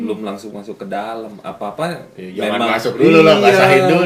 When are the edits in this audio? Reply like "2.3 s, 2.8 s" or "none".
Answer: none